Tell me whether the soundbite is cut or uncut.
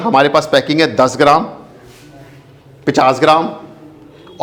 uncut